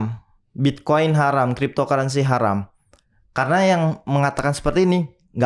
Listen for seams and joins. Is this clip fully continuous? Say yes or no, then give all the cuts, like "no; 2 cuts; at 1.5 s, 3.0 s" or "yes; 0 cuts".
yes; 0 cuts